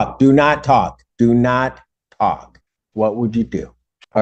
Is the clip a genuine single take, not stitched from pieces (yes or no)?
yes